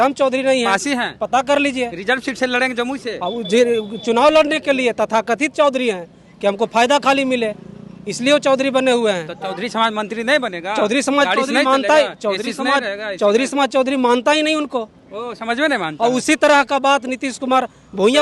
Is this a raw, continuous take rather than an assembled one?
yes; 0 cuts

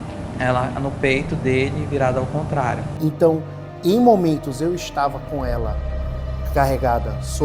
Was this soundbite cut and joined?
yes; 1 cut; at 2.9 s

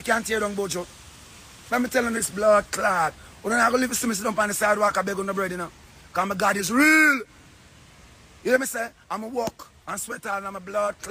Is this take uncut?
yes; 0 cuts

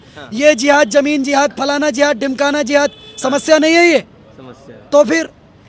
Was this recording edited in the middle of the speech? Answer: no; 0 cuts

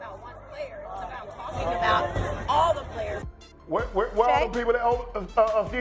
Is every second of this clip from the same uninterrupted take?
no; 1 cut; at 3.2 s

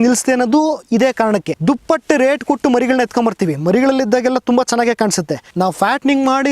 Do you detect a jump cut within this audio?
yes; 2 cuts; at 1.5 s, 5.4 s

